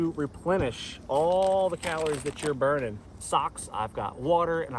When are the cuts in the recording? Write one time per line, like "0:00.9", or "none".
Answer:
0:03.1